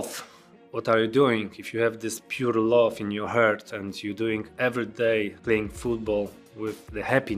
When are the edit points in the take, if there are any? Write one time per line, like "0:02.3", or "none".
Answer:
none